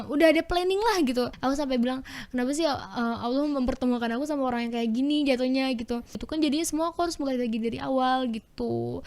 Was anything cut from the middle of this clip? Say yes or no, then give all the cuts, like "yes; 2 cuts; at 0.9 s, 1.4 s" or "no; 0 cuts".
yes; 2 cuts; at 1.3 s, 6.2 s